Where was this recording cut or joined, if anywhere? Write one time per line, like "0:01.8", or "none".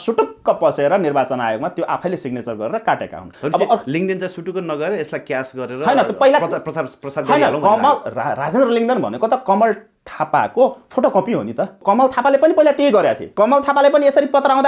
0:03.2
0:11.8
0:13.2